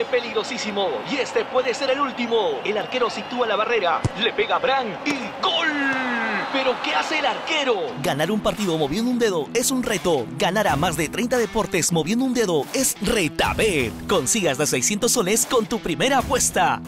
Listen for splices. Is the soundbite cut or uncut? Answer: uncut